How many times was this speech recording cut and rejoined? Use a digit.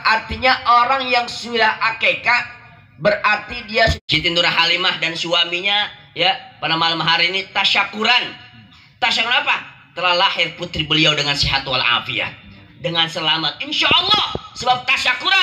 1